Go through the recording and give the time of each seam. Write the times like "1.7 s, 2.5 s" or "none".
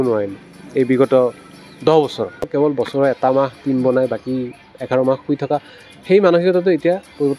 2.5 s